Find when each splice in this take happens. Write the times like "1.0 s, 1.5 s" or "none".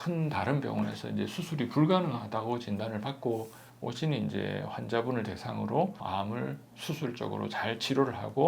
6.0 s